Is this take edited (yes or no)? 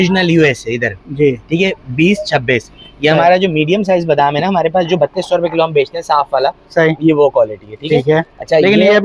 no